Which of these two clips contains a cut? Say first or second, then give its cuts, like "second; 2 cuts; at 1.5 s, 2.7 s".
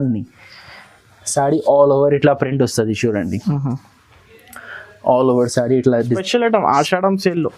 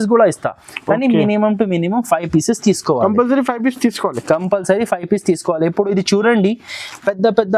first; 1 cut; at 6.2 s